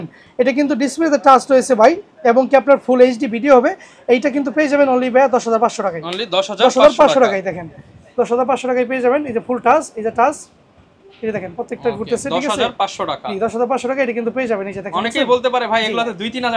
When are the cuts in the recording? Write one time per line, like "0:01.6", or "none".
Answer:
none